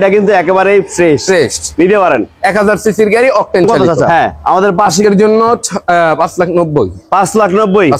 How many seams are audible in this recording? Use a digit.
1